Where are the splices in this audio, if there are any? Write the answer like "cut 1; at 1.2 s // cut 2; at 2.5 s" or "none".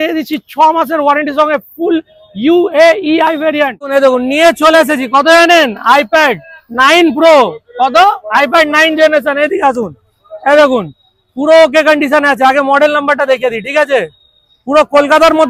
cut 1; at 4.0 s